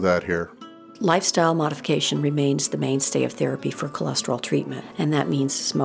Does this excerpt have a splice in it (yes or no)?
yes